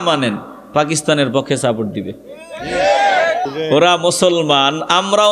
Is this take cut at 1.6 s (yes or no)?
no